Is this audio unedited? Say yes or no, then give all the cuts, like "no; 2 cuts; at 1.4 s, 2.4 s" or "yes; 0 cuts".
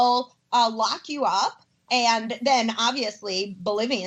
no; 1 cut; at 1.9 s